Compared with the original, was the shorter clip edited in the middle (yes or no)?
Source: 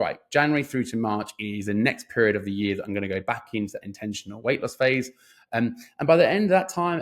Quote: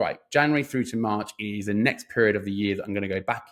no